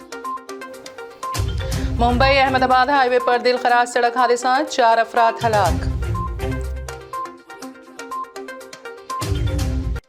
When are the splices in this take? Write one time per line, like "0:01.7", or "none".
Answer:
0:01.9